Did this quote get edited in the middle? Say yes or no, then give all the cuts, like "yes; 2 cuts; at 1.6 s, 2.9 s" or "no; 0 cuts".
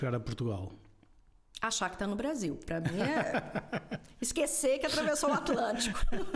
no; 0 cuts